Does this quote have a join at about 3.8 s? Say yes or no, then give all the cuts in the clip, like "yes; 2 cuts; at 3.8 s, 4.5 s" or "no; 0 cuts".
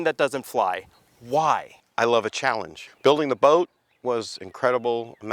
no; 1 cut; at 1.7 s